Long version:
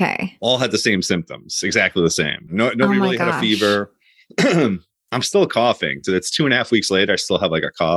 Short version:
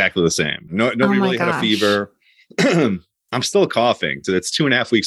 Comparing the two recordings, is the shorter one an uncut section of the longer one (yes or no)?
yes